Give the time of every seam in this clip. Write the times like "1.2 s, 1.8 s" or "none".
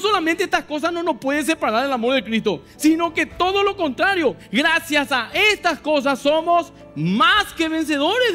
none

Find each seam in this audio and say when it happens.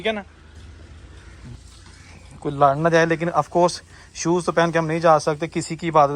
1.5 s

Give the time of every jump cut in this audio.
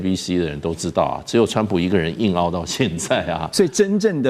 none

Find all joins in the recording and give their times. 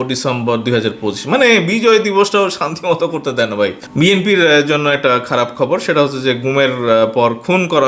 3.8 s

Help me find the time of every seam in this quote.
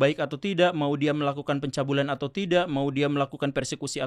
none

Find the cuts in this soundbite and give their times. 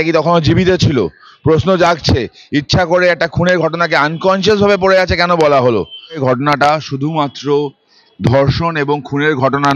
6.2 s

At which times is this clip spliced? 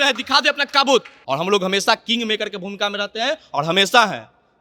1.1 s

